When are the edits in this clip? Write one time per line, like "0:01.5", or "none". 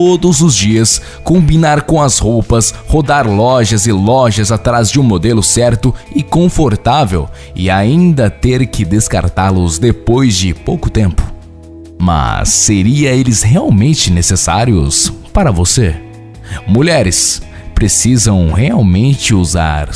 0:05.8